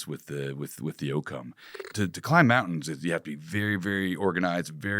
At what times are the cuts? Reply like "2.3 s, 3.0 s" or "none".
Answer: 1.7 s